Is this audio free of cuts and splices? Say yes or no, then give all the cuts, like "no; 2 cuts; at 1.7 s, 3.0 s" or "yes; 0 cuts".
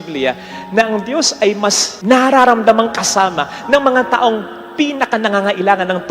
no; 1 cut; at 1.9 s